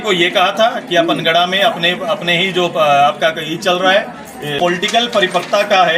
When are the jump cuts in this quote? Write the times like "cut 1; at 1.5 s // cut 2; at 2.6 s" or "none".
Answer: cut 1; at 4.6 s

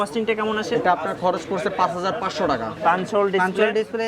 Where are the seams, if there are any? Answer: cut 1; at 2.7 s

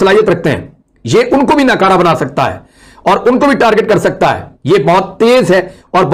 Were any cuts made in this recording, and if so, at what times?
none

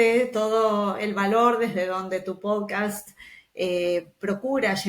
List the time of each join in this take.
none

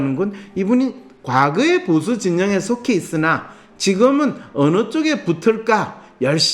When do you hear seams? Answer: none

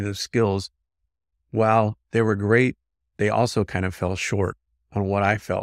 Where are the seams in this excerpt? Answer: none

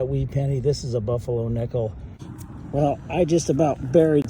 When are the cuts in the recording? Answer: cut 1; at 2.4 s

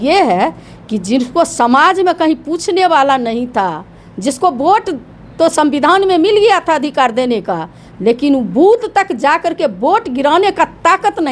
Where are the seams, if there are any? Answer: none

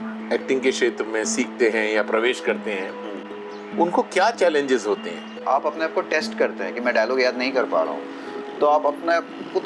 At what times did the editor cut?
cut 1; at 5.4 s

